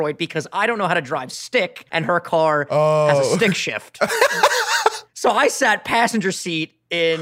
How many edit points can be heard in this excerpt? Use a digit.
2